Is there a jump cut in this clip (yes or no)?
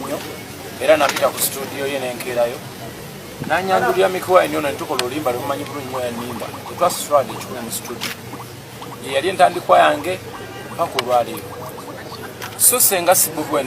no